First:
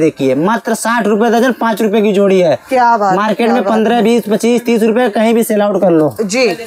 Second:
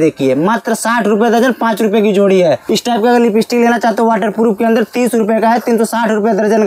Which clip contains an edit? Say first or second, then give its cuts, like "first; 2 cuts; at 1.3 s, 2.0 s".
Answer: second; 1 cut; at 2.6 s